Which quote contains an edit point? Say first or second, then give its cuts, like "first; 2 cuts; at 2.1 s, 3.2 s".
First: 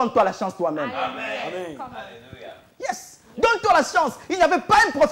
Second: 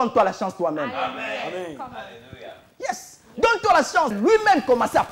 second; 1 cut; at 4.2 s